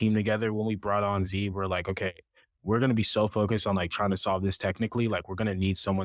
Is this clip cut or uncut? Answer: uncut